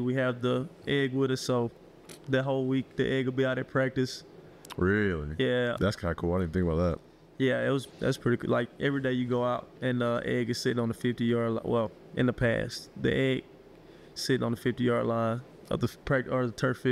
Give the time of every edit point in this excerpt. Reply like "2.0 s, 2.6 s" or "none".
5.8 s, 15.5 s